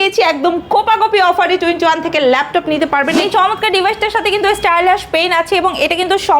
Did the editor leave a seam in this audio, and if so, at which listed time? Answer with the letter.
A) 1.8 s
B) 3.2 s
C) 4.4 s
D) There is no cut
B